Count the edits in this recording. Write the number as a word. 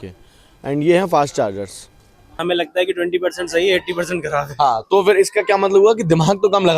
one